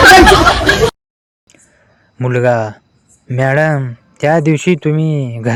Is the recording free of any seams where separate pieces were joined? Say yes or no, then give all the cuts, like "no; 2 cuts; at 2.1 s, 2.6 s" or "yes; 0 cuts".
yes; 0 cuts